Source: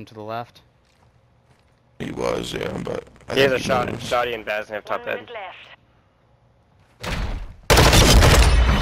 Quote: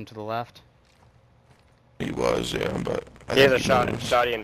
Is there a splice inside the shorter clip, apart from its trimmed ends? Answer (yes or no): no